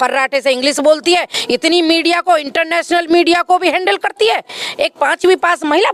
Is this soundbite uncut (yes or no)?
yes